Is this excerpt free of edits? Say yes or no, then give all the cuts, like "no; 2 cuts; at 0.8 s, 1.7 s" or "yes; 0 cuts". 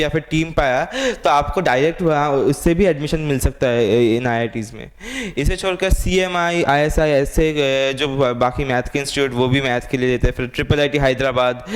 yes; 0 cuts